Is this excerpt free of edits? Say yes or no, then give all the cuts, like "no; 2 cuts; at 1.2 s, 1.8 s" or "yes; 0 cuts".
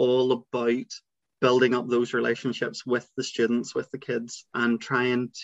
no; 1 cut; at 4.5 s